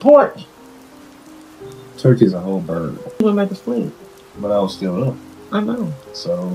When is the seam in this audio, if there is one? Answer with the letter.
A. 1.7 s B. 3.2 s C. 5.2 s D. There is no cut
B